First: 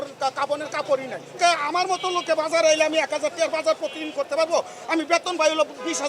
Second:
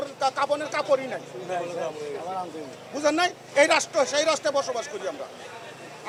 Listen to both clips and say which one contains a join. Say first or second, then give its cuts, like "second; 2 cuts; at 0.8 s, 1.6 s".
first; 1 cut; at 1.4 s